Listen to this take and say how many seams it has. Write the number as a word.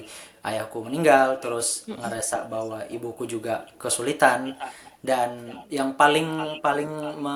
zero